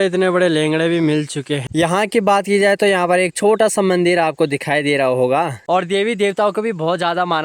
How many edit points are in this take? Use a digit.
2